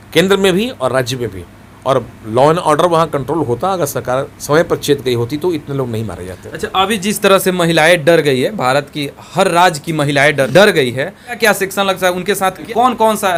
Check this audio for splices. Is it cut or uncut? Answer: uncut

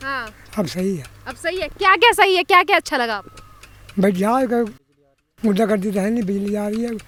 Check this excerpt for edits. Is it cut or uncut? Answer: uncut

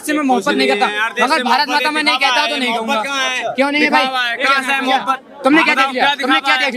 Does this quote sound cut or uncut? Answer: uncut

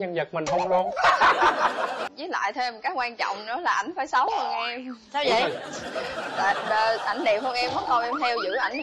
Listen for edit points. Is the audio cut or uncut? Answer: cut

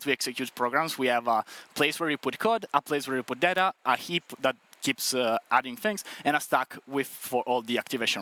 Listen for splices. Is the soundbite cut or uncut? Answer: uncut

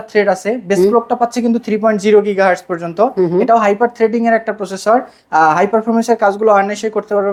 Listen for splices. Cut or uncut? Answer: uncut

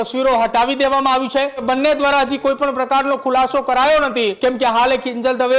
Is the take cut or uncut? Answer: cut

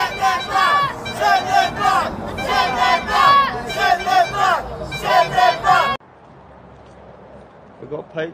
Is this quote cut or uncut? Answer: cut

